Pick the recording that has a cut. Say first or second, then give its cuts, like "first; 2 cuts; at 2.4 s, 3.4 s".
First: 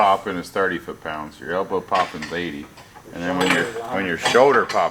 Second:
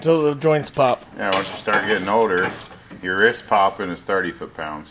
second; 1 cut; at 1.1 s